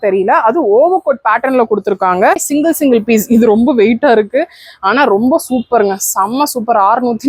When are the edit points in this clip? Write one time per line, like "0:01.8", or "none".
0:02.4